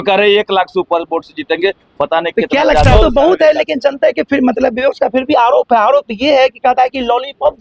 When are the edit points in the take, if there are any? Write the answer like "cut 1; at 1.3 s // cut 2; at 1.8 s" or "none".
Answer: cut 1; at 3.0 s